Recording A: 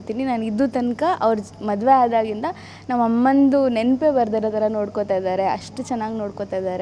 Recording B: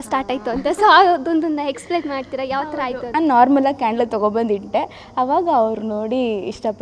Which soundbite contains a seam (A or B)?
B